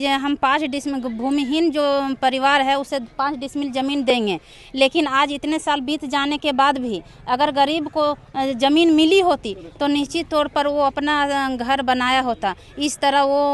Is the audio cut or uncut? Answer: uncut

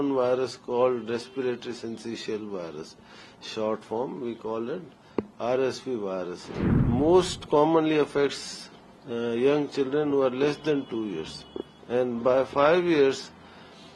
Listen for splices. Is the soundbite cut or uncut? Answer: cut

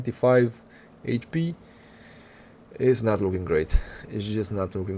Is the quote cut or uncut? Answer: uncut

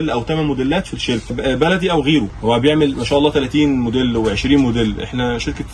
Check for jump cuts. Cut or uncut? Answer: cut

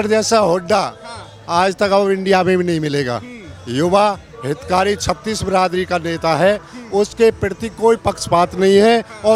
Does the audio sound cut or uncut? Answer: uncut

